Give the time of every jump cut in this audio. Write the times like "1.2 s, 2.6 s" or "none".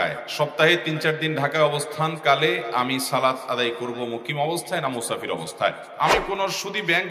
5.9 s